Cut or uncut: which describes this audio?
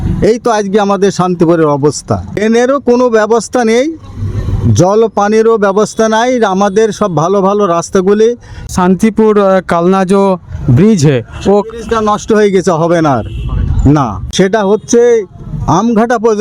cut